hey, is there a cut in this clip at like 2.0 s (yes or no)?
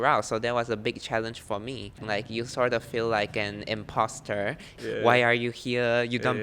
yes